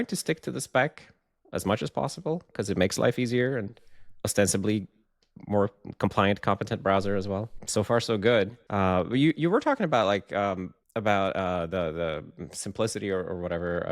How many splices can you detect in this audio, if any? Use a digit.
3